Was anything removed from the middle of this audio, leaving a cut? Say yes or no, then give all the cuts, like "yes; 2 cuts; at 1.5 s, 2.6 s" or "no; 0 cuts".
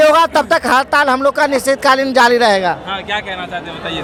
no; 0 cuts